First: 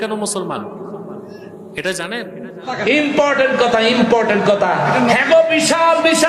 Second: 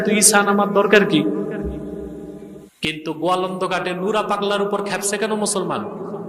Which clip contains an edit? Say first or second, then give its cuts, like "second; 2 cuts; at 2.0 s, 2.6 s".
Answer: first; 1 cut; at 2.8 s